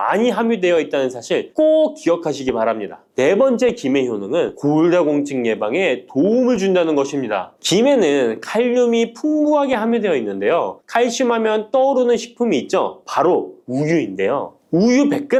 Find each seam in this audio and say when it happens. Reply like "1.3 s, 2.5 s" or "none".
none